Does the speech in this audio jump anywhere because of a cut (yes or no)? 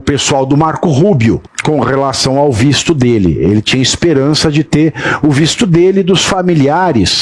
yes